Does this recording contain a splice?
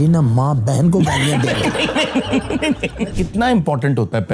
yes; 1 cut; at 2.9 s

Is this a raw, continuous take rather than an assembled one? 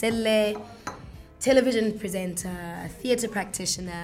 yes; 0 cuts

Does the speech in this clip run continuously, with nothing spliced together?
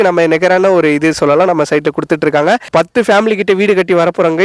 no; 1 cut; at 2.6 s

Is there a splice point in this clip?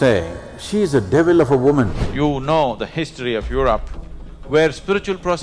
yes; 1 cut; at 2.0 s

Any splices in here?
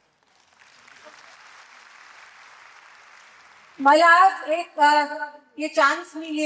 no; 0 cuts

